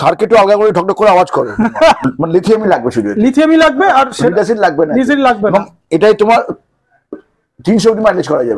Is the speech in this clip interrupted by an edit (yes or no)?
yes